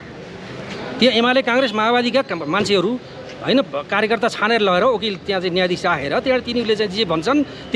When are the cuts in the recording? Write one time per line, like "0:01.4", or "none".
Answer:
none